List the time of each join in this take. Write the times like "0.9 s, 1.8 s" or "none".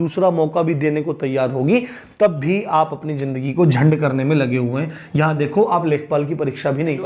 none